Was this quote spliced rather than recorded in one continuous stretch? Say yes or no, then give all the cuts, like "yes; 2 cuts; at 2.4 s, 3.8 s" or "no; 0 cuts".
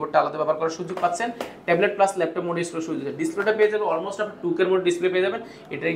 no; 0 cuts